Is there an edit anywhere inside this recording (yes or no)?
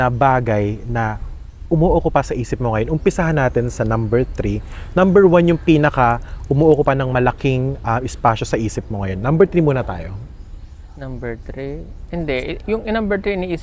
no